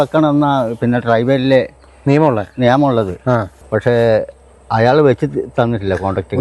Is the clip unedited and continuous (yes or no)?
no